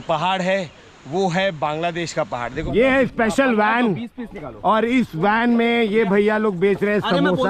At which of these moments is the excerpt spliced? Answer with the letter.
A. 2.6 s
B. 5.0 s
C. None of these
A